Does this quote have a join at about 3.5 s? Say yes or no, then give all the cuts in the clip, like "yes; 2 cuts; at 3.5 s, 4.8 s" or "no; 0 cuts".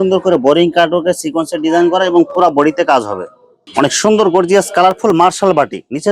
yes; 1 cut; at 3.5 s